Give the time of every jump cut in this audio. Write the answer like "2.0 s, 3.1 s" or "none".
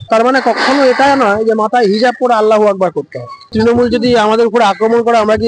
3.4 s